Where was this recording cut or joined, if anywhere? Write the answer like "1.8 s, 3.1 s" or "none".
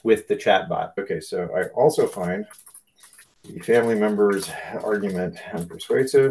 1.0 s